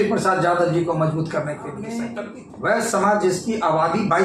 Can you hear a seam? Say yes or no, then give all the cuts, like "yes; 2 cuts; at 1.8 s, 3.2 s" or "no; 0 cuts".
yes; 1 cut; at 1.9 s